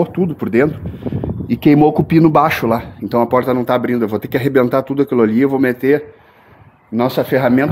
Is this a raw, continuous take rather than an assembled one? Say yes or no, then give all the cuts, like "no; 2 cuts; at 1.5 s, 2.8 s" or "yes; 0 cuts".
yes; 0 cuts